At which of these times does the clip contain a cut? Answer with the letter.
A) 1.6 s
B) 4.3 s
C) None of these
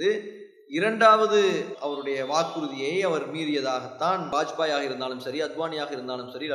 B